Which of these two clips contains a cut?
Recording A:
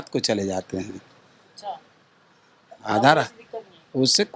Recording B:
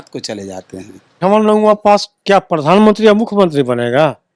B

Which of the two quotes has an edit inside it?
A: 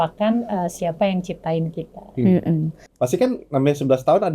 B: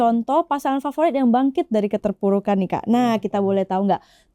A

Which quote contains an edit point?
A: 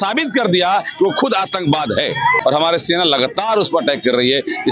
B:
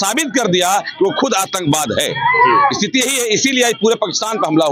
A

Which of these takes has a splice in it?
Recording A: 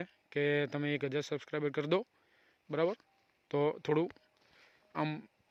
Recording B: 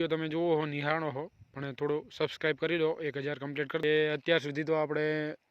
B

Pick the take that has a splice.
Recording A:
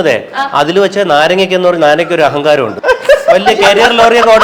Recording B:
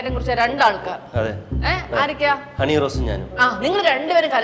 A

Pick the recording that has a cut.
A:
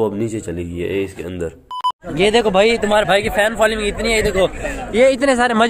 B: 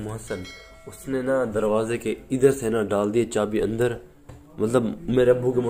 A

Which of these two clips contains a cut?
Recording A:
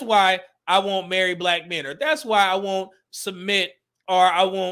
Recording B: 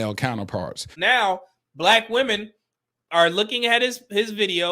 B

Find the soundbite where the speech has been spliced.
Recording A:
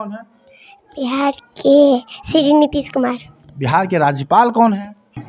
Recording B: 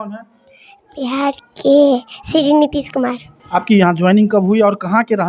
B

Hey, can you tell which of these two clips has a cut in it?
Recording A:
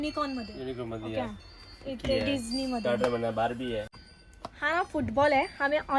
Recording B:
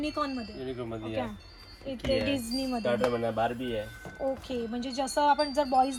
A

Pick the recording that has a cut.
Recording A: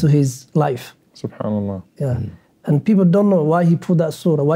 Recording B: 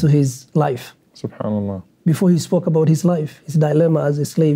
B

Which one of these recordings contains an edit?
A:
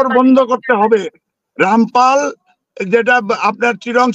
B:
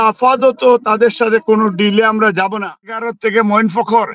B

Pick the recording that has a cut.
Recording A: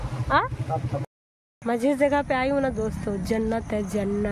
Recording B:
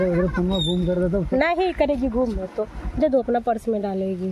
A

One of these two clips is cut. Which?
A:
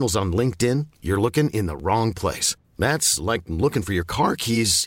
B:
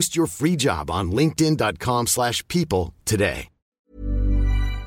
B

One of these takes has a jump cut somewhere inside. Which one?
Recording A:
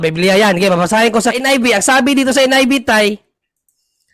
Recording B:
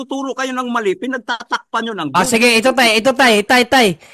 A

